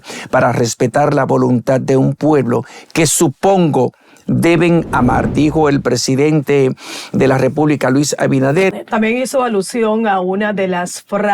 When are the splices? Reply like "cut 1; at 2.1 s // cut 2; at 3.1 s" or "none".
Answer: cut 1; at 8.7 s

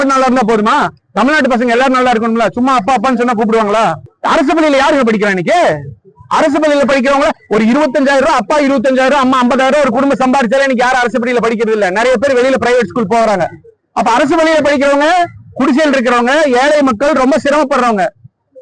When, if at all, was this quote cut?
cut 1; at 4.1 s

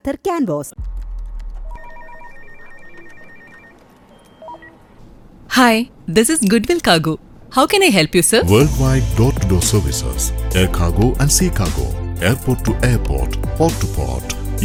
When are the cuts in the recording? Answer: none

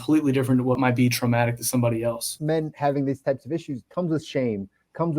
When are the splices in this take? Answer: cut 1; at 0.8 s // cut 2; at 2.3 s // cut 3; at 3.8 s

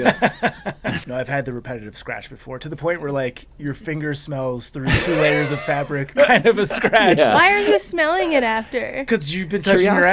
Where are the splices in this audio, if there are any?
cut 1; at 1.0 s

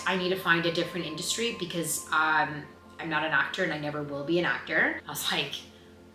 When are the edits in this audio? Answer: none

